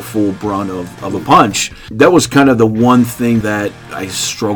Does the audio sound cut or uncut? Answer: cut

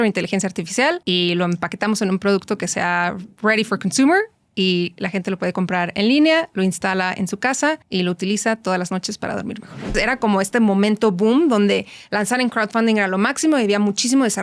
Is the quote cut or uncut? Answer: cut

